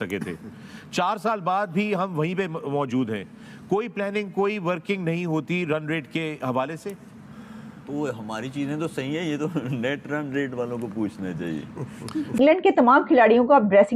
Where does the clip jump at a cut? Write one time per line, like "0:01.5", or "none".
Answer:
0:12.4